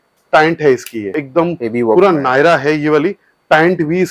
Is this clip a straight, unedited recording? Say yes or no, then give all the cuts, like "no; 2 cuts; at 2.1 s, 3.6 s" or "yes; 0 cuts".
no; 1 cut; at 1.2 s